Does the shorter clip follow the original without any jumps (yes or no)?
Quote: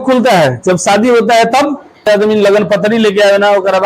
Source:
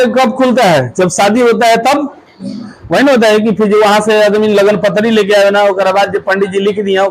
no